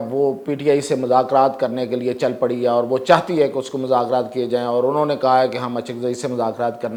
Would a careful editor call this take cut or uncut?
uncut